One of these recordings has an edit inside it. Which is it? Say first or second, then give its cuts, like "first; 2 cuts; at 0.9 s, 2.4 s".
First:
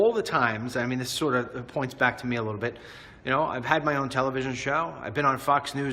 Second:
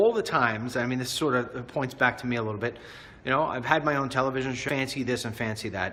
first; 1 cut; at 4.6 s